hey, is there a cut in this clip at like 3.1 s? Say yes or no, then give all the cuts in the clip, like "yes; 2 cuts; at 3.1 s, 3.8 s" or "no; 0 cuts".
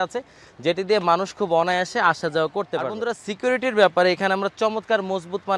yes; 1 cut; at 3.1 s